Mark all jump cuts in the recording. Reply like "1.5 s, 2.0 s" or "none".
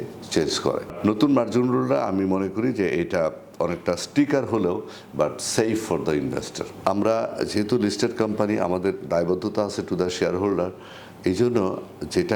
1.0 s, 6.6 s